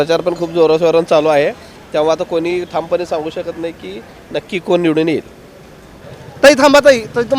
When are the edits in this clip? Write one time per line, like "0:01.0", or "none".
0:06.0